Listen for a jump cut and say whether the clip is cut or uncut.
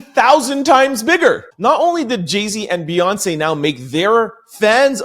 cut